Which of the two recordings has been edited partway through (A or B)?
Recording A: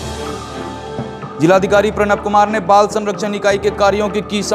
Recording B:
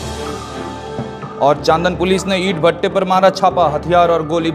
A